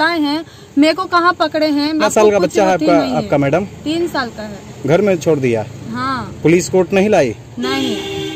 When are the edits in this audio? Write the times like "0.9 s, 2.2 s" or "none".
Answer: 2.0 s